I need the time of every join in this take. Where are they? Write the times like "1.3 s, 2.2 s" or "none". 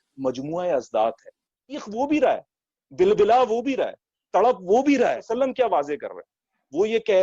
1.8 s, 5.3 s